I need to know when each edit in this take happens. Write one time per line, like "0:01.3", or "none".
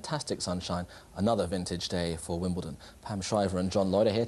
0:02.4